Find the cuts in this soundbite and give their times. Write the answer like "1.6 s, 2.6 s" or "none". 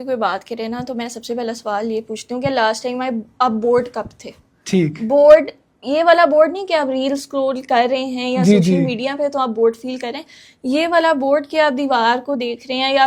none